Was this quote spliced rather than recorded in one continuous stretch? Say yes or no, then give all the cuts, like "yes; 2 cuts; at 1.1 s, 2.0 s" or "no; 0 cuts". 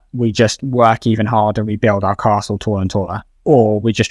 no; 0 cuts